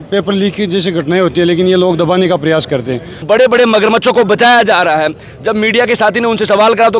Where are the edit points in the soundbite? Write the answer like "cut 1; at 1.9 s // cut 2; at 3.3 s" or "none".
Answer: cut 1; at 3.1 s